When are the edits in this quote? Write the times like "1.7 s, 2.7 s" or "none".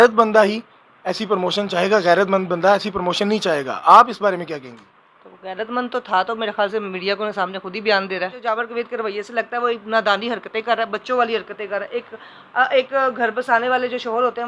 8.4 s

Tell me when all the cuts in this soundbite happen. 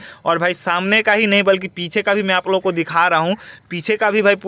none

